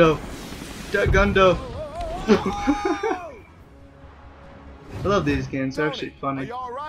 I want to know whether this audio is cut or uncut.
cut